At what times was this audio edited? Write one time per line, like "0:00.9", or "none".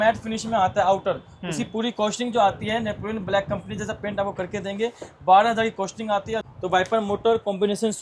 0:06.5